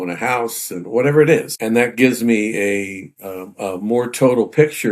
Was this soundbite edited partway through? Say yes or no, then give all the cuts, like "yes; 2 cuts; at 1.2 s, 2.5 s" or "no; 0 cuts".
yes; 1 cut; at 1.5 s